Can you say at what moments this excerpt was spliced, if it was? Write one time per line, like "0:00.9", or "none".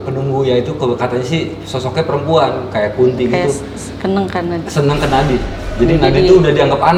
none